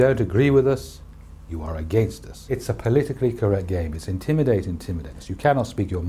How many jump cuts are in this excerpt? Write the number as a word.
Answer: one